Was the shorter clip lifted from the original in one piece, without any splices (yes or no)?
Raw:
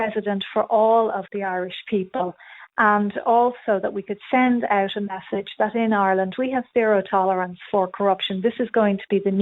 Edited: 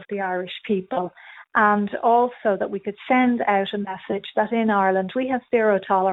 yes